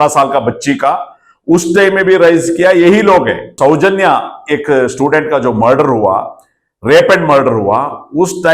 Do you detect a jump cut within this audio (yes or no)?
yes